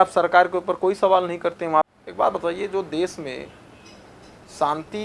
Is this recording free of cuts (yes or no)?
no